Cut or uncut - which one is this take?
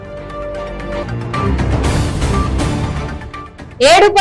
uncut